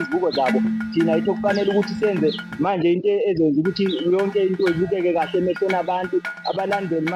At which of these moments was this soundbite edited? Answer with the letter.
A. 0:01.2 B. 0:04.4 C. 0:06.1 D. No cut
D